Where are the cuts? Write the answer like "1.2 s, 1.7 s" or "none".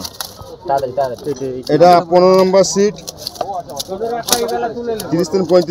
none